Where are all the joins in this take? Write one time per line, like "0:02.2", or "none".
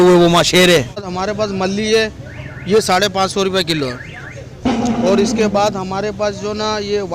0:01.2